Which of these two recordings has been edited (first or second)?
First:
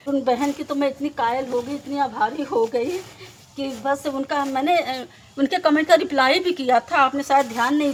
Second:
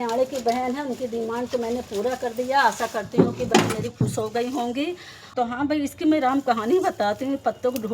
second